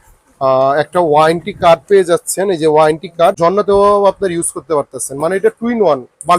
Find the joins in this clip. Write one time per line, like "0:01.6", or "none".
0:03.4